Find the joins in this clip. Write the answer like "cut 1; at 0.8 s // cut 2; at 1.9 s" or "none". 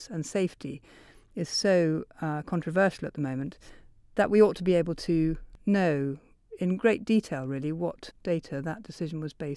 cut 1; at 5.5 s // cut 2; at 8.1 s